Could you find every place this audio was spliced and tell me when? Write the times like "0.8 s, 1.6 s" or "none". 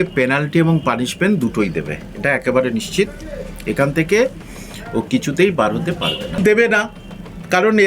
6.4 s

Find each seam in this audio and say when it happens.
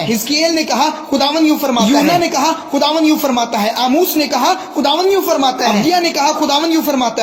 none

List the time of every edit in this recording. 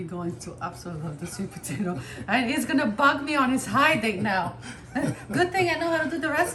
none

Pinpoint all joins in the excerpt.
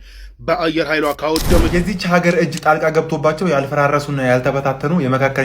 1.7 s

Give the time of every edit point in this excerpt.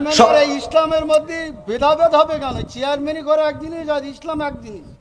none

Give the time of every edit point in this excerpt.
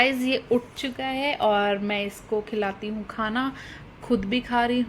none

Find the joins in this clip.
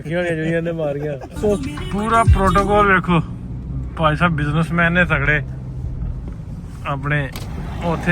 1.6 s

